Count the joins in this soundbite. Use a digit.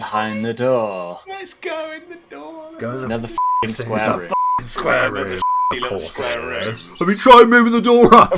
0